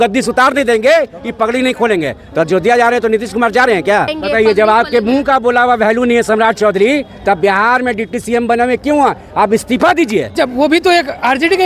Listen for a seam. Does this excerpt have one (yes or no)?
yes